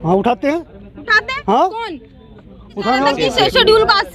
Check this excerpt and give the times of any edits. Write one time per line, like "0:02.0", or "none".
0:03.1